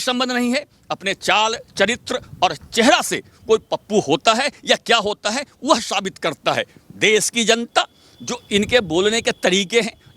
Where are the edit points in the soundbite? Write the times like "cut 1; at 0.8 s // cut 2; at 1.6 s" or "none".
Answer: none